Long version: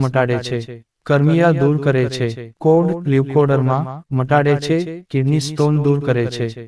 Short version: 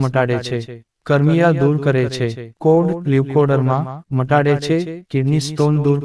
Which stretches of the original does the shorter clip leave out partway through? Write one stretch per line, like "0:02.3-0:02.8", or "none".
none